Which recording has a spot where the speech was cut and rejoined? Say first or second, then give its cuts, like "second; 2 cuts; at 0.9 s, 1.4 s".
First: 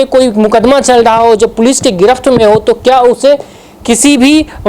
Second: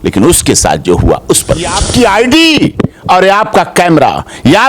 second; 1 cut; at 1.8 s